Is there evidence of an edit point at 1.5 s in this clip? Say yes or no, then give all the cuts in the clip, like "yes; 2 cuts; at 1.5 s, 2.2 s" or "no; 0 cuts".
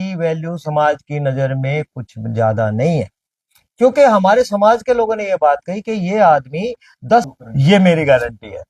no; 1 cut; at 7.2 s